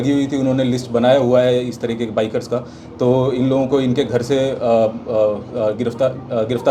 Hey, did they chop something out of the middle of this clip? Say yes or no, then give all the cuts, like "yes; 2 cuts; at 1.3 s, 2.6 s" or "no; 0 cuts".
no; 0 cuts